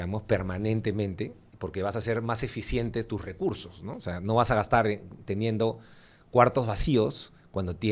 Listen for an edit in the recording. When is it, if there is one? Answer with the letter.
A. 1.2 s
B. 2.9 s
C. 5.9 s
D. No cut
D